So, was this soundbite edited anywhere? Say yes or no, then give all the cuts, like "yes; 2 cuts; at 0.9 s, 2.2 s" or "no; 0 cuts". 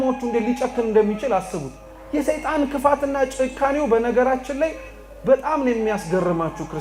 no; 0 cuts